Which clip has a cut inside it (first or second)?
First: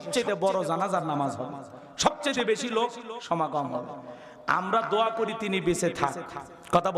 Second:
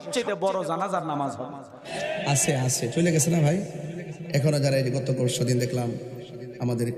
second